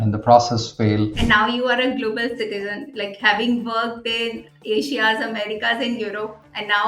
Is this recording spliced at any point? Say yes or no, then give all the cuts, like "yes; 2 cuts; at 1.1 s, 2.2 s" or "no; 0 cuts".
yes; 1 cut; at 1.2 s